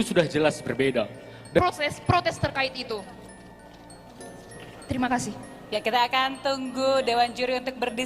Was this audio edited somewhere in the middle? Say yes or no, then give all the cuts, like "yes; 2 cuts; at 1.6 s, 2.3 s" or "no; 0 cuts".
no; 0 cuts